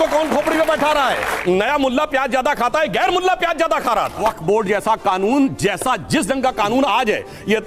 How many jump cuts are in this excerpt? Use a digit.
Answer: 2